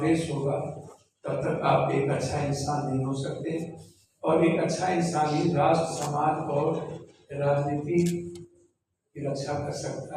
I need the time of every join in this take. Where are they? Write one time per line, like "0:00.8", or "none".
none